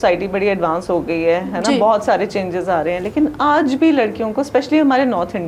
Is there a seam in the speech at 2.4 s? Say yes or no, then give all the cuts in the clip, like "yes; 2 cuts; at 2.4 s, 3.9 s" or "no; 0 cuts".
no; 0 cuts